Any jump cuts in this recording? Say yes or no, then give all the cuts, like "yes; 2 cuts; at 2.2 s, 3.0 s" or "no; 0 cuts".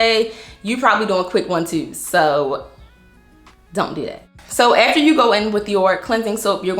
no; 0 cuts